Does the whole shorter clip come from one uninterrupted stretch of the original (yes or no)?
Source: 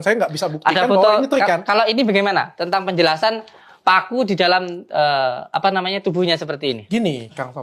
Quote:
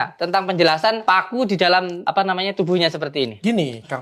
no